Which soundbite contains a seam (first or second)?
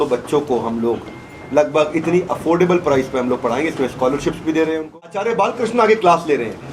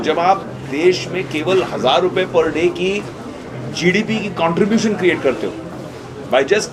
first